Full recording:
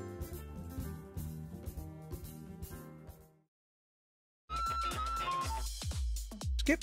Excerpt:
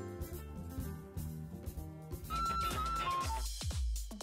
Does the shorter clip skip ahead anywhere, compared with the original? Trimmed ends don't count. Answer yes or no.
yes